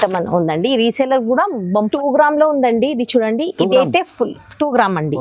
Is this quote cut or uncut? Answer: cut